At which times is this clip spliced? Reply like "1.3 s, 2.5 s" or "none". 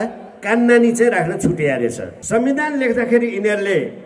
2.1 s

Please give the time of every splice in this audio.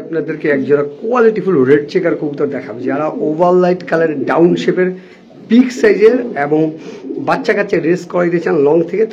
none

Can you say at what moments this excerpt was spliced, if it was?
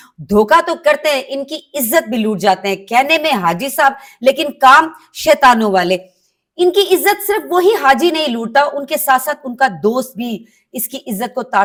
none

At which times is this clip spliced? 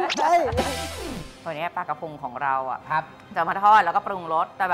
1.3 s

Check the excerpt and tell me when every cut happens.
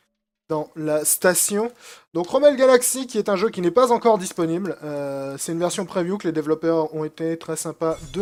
none

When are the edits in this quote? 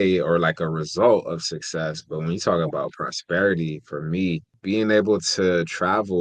4.5 s

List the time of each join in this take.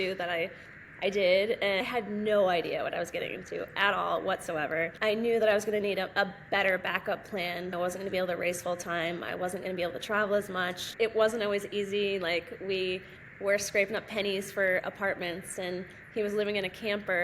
1.8 s, 4.9 s, 7.7 s, 10.8 s

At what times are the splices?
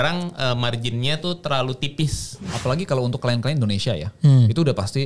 2.5 s

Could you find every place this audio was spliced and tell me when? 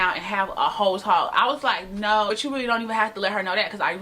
2.3 s

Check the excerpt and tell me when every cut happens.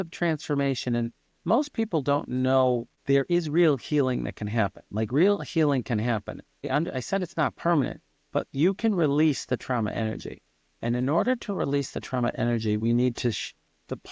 2.9 s, 6.5 s

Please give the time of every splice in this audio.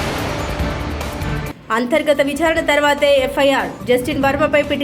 1.3 s

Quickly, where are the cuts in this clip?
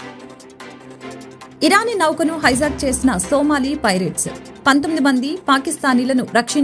1.2 s

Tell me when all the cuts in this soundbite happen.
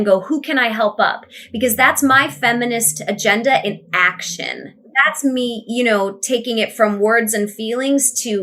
4.8 s

